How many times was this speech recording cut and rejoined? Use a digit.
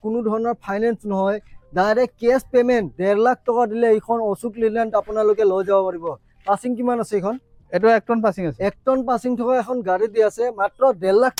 0